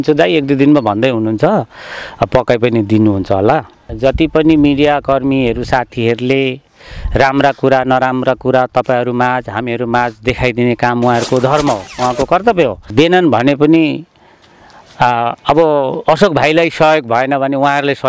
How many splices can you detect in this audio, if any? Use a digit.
2